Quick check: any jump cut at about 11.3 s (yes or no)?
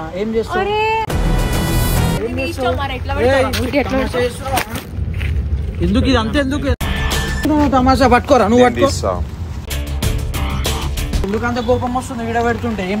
yes